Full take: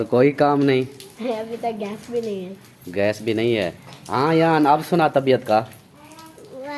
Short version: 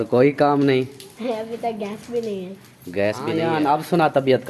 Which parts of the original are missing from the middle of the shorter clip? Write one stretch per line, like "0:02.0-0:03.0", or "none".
0:03.4-0:04.4